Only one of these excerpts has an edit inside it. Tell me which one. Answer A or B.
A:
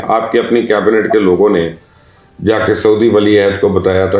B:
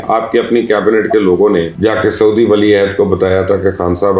B